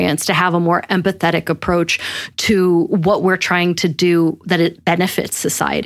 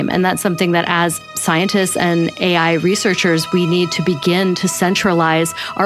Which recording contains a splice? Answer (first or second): second